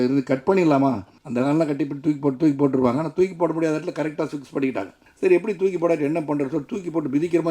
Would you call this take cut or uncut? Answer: cut